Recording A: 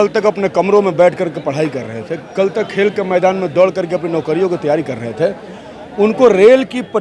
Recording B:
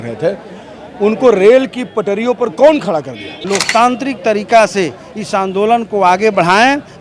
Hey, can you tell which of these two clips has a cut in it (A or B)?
B